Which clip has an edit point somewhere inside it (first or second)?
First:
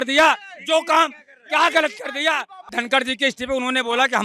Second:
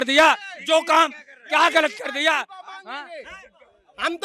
first